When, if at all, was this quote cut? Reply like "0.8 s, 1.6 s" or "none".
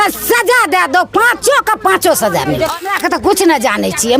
2.9 s